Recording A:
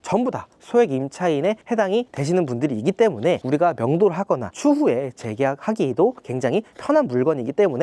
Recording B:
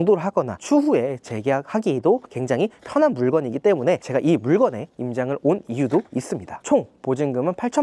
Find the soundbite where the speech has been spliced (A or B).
B